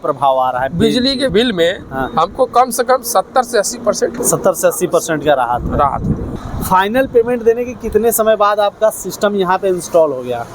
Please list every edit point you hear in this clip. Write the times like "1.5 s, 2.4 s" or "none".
1.3 s, 4.2 s, 6.3 s